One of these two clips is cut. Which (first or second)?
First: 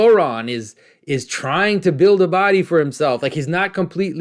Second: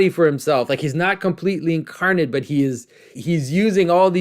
second